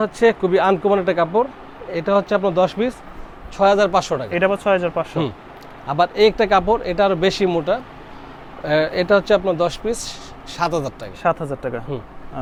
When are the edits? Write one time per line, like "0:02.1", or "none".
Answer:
none